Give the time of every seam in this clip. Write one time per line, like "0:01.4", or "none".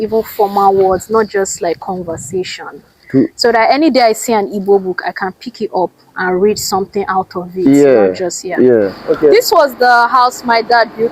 0:09.0

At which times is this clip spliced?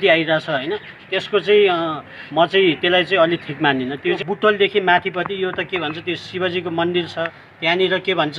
0:04.2
0:07.4

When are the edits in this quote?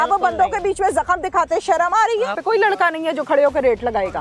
0:02.4

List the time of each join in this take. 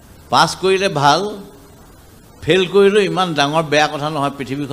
none

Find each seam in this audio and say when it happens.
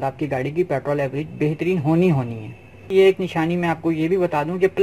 0:02.9

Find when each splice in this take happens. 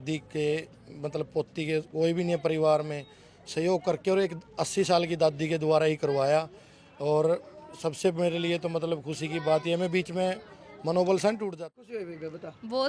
0:11.5

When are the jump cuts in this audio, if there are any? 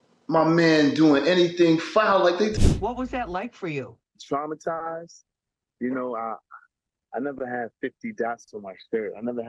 0:02.6

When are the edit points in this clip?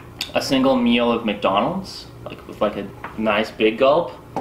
none

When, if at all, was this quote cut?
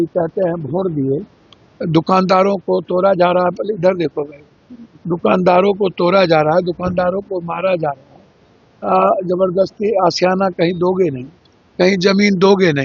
none

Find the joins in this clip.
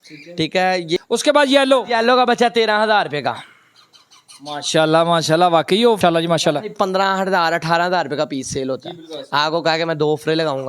0:01.0
0:06.0

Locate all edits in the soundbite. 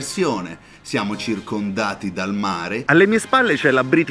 0:02.8

